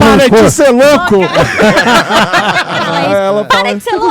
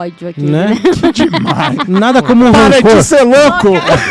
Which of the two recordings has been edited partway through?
first; 1 cut; at 2.9 s

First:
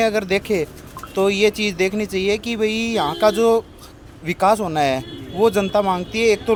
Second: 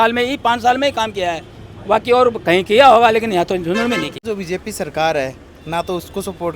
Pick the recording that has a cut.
second; 1 cut; at 4.2 s

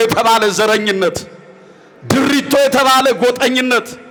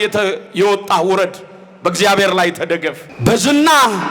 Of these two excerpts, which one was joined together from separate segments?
second; 1 cut; at 3.1 s

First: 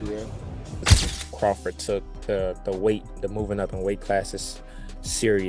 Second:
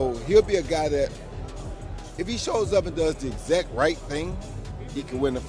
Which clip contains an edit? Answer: first; 1 cut; at 1.0 s

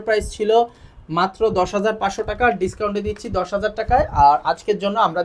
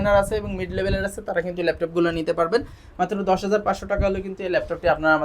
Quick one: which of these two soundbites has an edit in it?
second; 1 cut; at 2.8 s

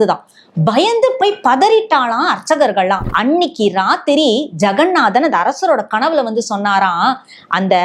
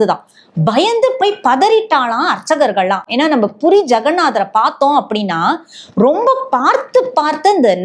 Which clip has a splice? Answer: first; 1 cut; at 3.0 s

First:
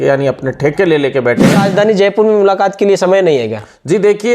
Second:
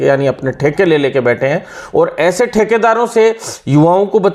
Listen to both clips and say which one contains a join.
first; 1 cut; at 1.6 s

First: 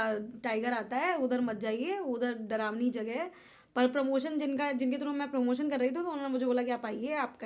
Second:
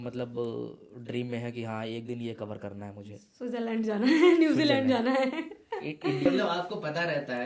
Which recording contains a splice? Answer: second; 1 cut; at 6.3 s

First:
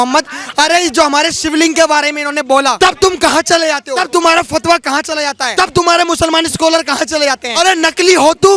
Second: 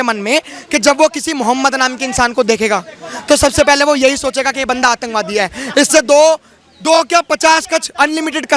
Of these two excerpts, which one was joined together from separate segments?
first; 4 cuts; at 2.8 s, 4.0 s, 5.4 s, 7.5 s

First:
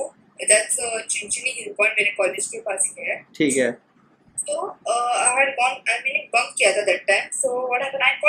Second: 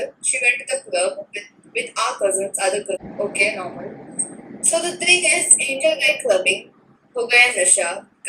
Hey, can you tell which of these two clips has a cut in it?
second; 1 cut; at 3.1 s

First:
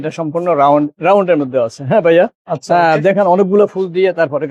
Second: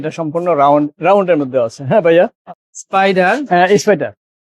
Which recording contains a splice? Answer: second; 1 cut; at 2.5 s

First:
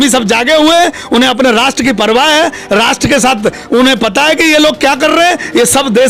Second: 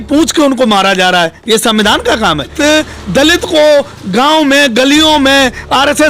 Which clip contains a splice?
second; 1 cut; at 2.5 s

